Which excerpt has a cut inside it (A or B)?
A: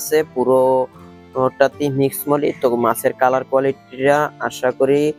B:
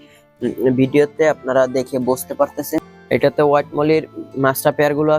B